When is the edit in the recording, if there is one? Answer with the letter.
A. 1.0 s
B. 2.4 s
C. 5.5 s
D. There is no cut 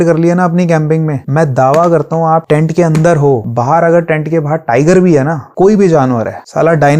C